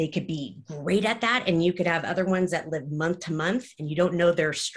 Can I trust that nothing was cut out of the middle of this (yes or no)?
yes